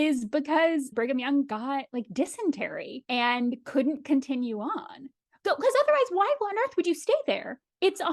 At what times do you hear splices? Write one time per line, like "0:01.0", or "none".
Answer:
0:00.9